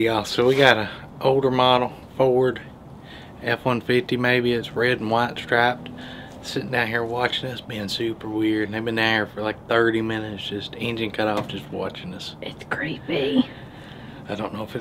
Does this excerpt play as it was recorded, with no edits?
yes; 0 cuts

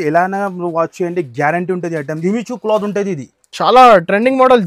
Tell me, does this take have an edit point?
yes; 1 cut; at 2.2 s

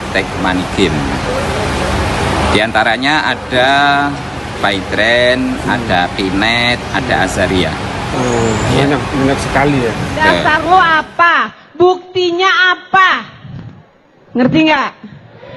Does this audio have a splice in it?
yes; 1 cut; at 10.4 s

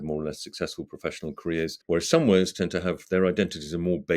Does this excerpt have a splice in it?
yes; 1 cut; at 1.8 s

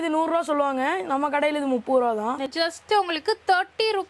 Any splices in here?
yes; 1 cut; at 2.5 s

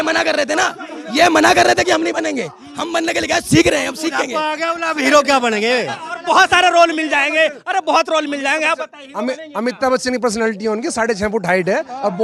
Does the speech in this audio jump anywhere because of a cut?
no; 0 cuts

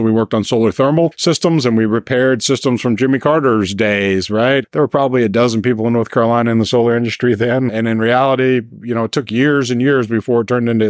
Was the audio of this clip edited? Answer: yes; 3 cuts; at 1.2 s, 4.7 s, 7.7 s

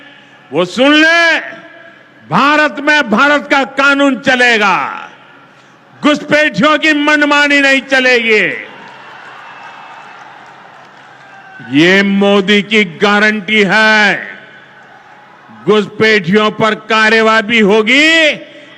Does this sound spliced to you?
no; 0 cuts

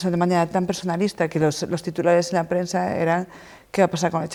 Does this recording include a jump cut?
no; 0 cuts

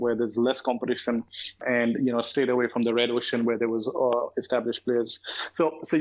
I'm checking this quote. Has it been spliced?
no; 0 cuts

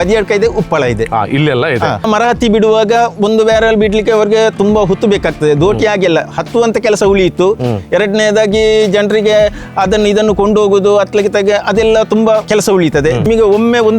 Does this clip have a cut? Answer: yes; 2 cuts; at 2.0 s, 13.0 s

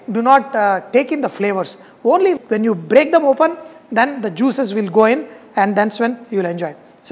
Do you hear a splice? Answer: no; 0 cuts

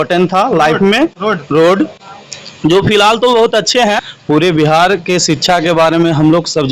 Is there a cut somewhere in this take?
yes; 1 cut; at 4.1 s

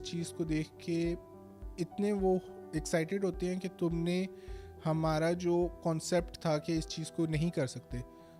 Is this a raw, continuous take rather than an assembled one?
yes; 0 cuts

